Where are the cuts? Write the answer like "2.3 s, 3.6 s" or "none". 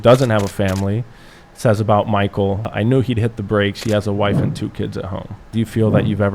2.7 s, 5.5 s

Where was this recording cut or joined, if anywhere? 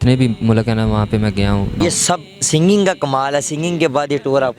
1.8 s

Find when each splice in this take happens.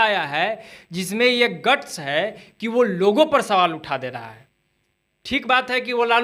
none

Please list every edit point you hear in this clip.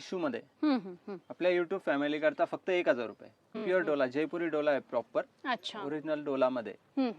3.6 s

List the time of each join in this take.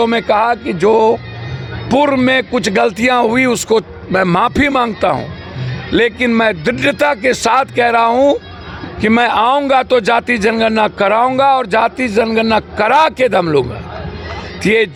none

